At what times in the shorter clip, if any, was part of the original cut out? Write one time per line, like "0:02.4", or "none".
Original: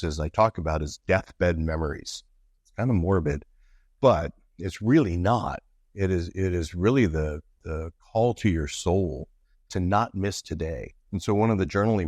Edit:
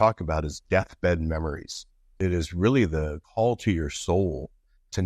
0:02.1
0:03.2